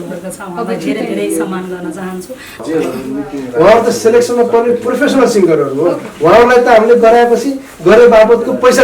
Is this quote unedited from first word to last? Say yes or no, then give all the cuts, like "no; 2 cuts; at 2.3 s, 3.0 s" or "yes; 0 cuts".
no; 1 cut; at 2.6 s